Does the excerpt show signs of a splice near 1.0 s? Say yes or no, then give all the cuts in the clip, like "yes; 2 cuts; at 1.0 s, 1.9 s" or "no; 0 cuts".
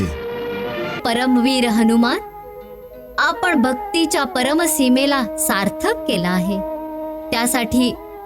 yes; 1 cut; at 1.0 s